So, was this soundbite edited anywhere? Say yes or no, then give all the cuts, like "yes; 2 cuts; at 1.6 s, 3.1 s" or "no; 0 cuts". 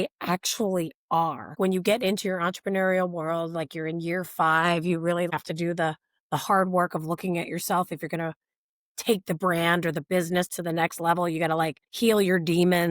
yes; 3 cuts; at 1.5 s, 5.3 s, 11.8 s